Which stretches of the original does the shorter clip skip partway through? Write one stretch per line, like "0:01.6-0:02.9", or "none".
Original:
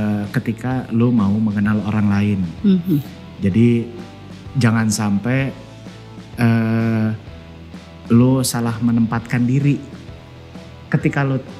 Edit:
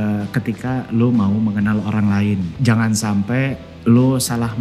0:02.5-0:04.5
0:05.6-0:07.9